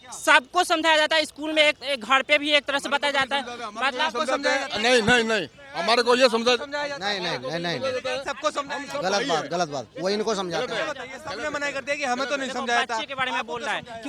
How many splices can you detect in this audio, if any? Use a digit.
0